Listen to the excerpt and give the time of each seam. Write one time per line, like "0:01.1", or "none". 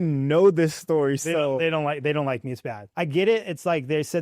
0:02.8